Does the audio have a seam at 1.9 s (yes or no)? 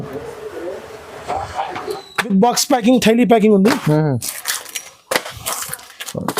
yes